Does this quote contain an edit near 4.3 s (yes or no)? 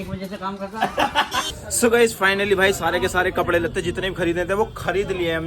no